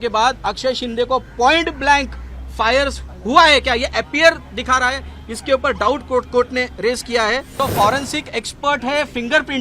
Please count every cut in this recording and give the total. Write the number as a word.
one